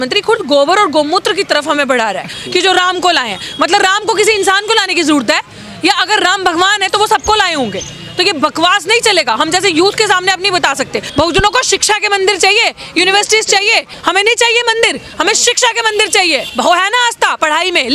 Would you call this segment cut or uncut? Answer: cut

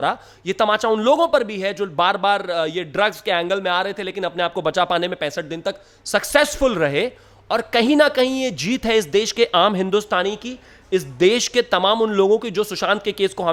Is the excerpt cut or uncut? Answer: uncut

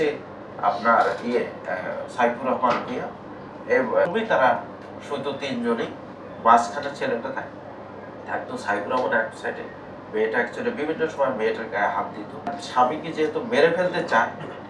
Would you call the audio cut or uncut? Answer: cut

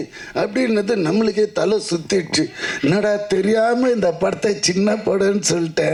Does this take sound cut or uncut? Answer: uncut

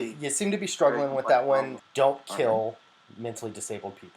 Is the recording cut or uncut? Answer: cut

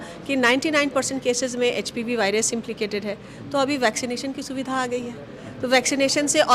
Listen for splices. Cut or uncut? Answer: uncut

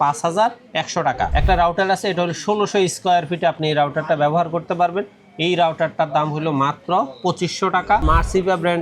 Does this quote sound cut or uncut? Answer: cut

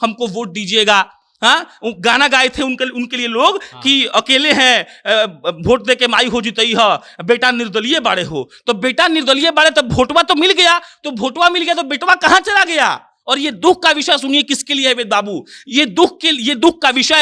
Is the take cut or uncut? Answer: uncut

